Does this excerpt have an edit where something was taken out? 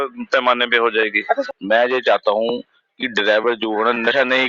yes; 1 cut; at 1.4 s

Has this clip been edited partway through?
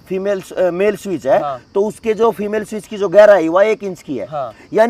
no; 0 cuts

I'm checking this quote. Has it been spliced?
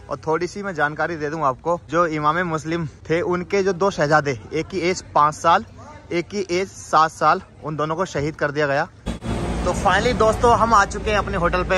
yes; 3 cuts; at 1.8 s, 2.9 s, 9.5 s

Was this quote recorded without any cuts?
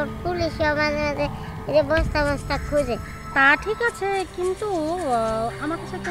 no; 1 cut; at 3.2 s

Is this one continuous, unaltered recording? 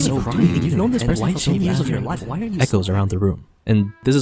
yes; 0 cuts

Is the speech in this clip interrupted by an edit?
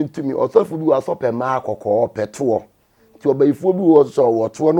no; 0 cuts

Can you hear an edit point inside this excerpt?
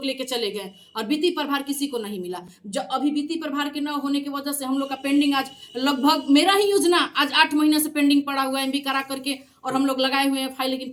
no; 0 cuts

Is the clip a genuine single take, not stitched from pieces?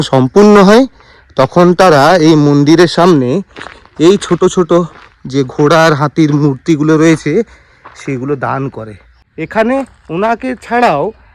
no; 1 cut; at 9.2 s

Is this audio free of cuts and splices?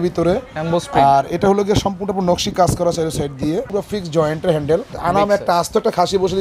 no; 2 cuts; at 3.7 s, 4.9 s

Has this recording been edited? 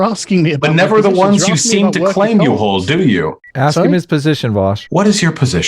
yes; 2 cuts; at 3.4 s, 4.8 s

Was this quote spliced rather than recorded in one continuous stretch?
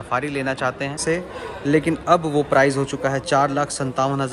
yes; 1 cut; at 1.0 s

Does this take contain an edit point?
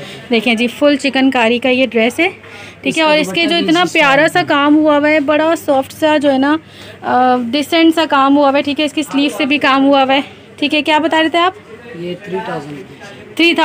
no; 0 cuts

